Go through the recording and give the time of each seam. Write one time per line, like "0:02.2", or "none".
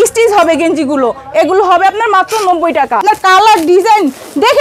0:03.0